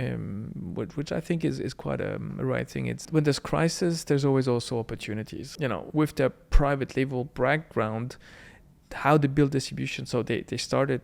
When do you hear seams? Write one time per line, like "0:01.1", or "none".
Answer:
0:03.0
0:05.4